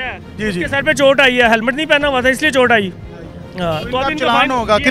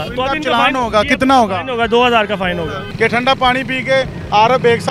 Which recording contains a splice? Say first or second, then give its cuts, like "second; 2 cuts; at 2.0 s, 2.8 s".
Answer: second; 1 cut; at 2.8 s